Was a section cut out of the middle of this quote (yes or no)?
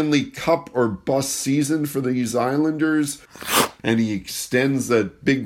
yes